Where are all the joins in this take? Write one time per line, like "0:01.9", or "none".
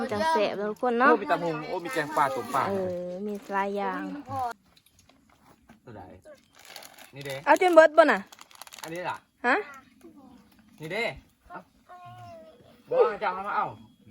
0:04.6